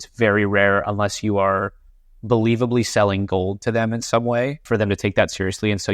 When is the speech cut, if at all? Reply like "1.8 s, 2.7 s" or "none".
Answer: 4.6 s